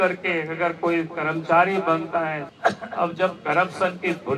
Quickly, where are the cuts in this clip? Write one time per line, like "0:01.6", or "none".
0:02.4